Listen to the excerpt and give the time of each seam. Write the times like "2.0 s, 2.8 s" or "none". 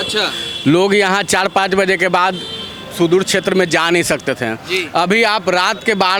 none

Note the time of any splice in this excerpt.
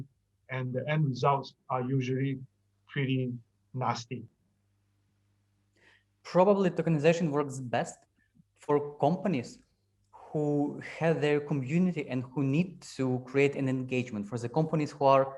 none

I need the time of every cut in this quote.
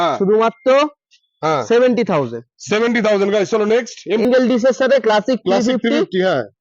4.2 s

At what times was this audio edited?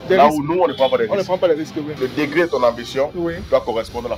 1.9 s

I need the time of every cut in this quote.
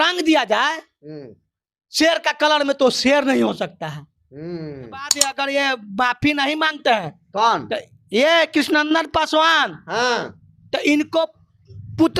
5.2 s

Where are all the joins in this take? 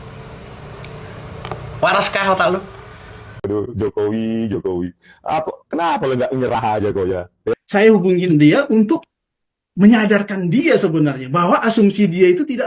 3.3 s, 7.5 s

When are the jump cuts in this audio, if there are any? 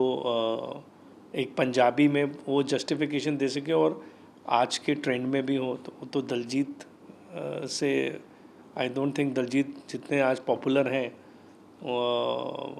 none

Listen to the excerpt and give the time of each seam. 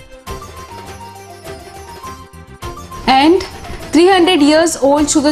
2.9 s

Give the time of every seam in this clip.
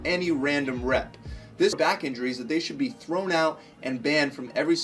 1.8 s

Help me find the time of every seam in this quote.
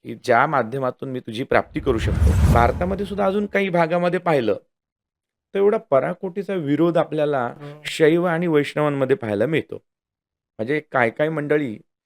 2.5 s

